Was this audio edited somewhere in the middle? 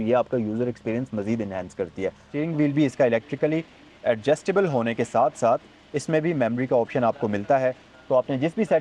yes; 1 cut; at 2.3 s

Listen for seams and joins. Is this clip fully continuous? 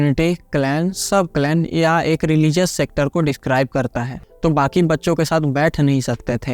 no; 1 cut; at 4.2 s

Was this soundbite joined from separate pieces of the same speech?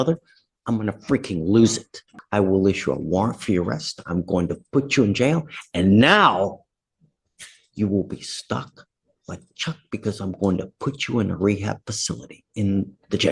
yes; 1 cut; at 2.1 s

